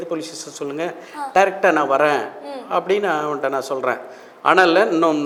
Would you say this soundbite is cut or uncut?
uncut